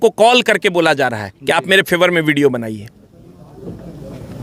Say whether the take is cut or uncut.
uncut